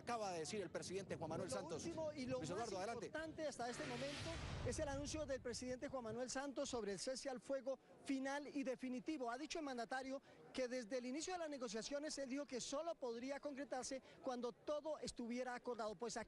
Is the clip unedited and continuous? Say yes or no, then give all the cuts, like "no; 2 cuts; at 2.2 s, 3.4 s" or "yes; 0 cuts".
yes; 0 cuts